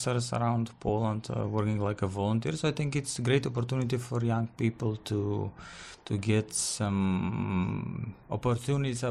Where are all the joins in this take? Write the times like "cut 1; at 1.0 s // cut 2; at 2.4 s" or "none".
none